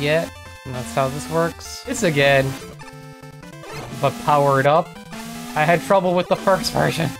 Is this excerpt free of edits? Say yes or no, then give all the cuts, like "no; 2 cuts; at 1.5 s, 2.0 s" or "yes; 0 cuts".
no; 2 cuts; at 2.0 s, 3.9 s